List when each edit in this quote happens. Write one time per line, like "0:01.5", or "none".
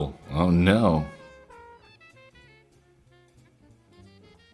0:01.9